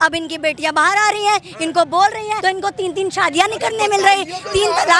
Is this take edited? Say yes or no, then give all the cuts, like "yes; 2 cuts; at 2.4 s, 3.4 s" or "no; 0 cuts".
yes; 1 cut; at 2.4 s